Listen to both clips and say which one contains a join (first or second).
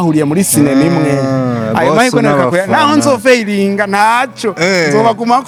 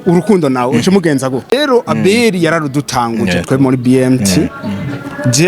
second